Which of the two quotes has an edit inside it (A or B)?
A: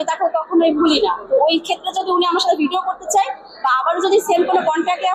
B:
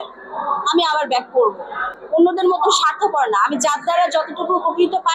B